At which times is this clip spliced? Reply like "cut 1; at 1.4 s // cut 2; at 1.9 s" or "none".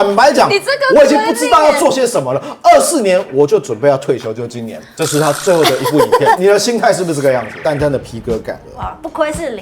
cut 1; at 7.5 s